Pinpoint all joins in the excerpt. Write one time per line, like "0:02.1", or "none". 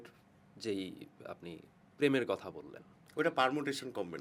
none